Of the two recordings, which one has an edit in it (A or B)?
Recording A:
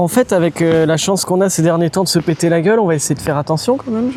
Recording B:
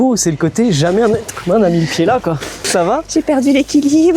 B